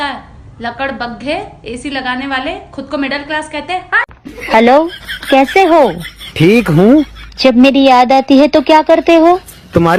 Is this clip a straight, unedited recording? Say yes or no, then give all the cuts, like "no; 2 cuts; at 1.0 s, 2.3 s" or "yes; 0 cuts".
yes; 0 cuts